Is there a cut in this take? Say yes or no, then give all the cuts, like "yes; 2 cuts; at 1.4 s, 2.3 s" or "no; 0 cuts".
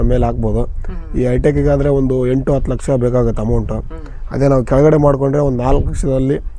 no; 0 cuts